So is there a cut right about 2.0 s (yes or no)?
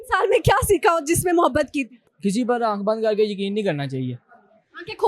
yes